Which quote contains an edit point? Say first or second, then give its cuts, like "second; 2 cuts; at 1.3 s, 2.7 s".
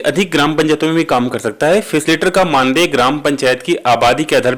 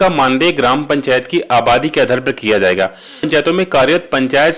second; 1 cut; at 3.2 s